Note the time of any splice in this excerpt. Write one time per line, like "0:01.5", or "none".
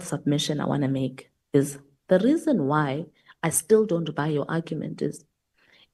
none